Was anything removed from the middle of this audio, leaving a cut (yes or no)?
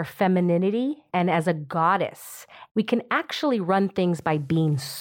yes